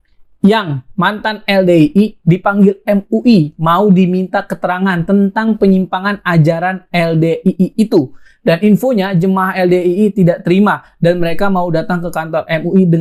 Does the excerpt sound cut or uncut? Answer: uncut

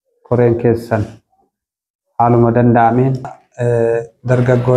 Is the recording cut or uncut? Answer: cut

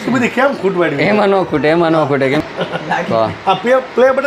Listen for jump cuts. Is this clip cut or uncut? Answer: cut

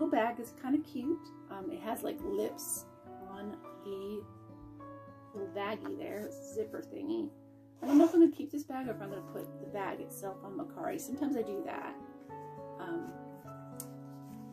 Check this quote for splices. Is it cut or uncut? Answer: uncut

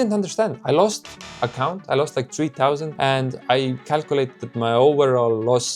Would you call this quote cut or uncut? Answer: uncut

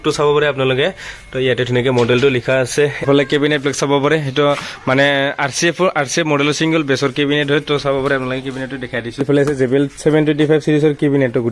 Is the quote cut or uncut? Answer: cut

